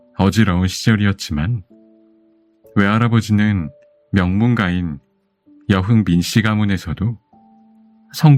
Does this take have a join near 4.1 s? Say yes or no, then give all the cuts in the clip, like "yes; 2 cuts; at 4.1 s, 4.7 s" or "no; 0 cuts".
no; 0 cuts